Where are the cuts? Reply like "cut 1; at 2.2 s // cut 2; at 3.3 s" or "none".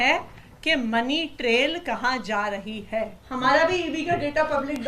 cut 1; at 3.2 s